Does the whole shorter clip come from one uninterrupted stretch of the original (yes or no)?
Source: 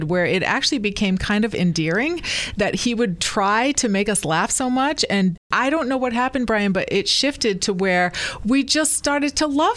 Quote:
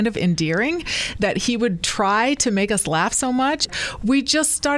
no